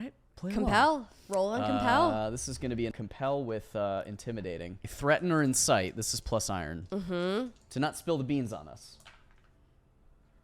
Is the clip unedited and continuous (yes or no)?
no